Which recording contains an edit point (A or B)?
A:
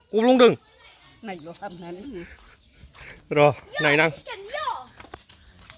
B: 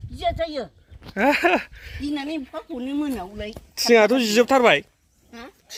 A